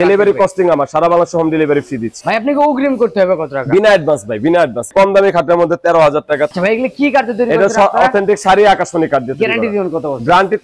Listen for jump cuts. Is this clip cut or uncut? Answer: cut